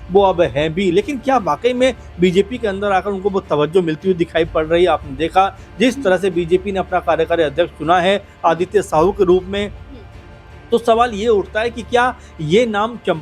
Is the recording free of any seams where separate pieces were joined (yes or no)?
yes